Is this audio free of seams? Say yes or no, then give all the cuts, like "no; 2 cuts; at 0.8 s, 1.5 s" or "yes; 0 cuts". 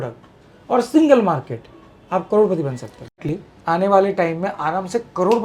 no; 1 cut; at 3.2 s